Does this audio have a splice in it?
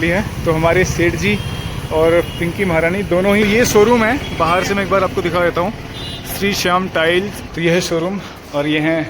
yes; 2 cuts; at 3.4 s, 7.4 s

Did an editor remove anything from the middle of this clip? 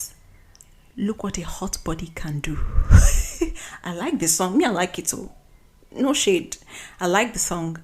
no; 0 cuts

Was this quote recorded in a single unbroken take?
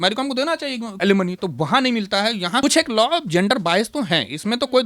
no; 2 cuts; at 0.9 s, 2.6 s

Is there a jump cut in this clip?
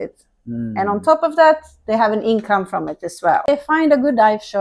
yes; 1 cut; at 3.5 s

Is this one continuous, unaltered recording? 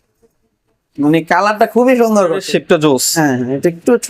no; 1 cut; at 2.4 s

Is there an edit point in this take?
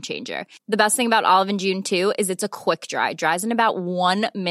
no; 0 cuts

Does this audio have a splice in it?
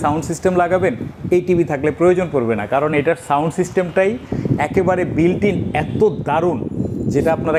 no; 0 cuts

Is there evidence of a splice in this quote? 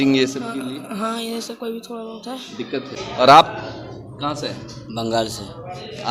yes; 1 cut; at 3.0 s

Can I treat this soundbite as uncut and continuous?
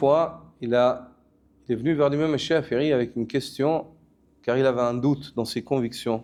yes; 0 cuts

